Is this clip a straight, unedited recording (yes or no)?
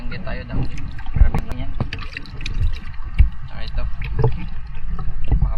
no